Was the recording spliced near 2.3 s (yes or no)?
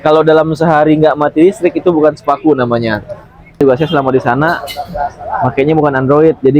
no